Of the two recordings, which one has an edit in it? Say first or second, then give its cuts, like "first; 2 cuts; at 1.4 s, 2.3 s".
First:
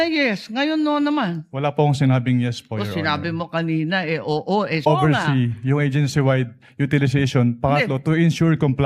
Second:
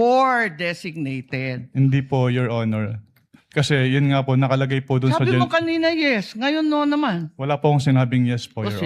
first; 1 cut; at 4.8 s